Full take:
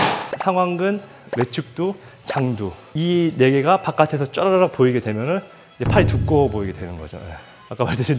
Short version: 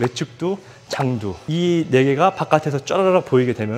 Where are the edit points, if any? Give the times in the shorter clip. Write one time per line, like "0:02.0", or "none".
0:01.4